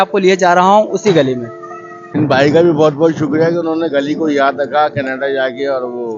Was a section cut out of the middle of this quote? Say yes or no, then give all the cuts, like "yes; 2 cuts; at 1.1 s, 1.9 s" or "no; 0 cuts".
yes; 1 cut; at 2.1 s